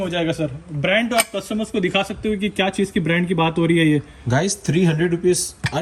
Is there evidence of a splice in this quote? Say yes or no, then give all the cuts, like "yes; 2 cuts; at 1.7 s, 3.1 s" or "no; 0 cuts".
no; 0 cuts